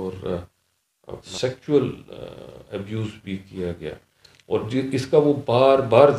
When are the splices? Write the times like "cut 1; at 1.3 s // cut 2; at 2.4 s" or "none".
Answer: cut 1; at 1.3 s